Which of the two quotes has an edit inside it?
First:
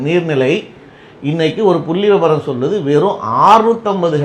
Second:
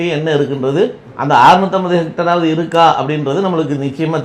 second; 1 cut; at 1.1 s

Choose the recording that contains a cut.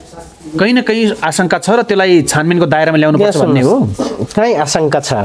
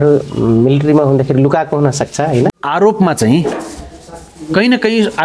second; 1 cut; at 2.5 s

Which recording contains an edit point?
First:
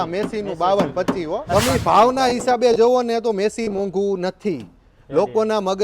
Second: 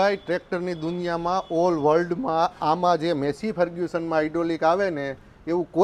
first; 1 cut; at 1.5 s

